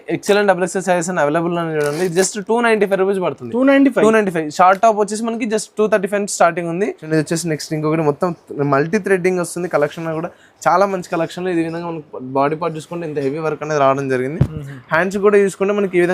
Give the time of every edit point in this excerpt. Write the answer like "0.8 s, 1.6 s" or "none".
7.0 s

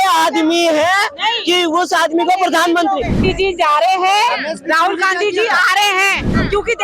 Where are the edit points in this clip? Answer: 3.2 s

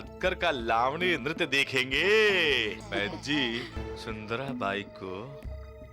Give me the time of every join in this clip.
2.8 s, 3.9 s

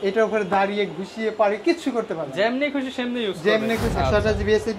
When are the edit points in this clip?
3.9 s

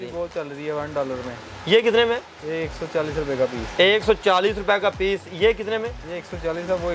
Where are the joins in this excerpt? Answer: none

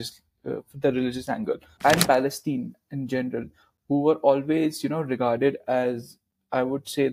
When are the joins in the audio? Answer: 1.7 s

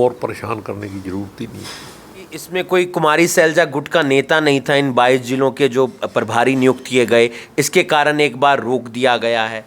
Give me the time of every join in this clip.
2.5 s

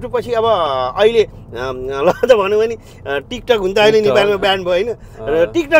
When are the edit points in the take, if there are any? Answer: none

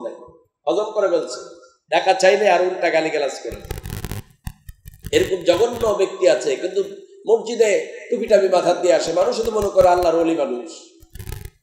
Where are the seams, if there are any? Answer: none

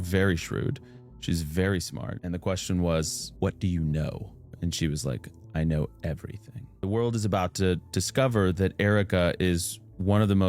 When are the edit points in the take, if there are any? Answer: 2.1 s, 6.8 s

